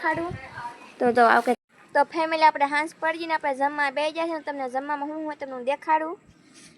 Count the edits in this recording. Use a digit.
1